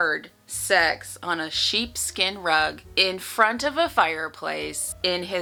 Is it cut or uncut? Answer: uncut